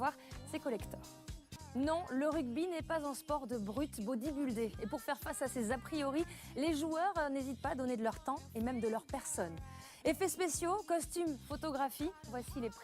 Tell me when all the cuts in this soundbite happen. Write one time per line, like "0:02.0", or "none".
0:04.9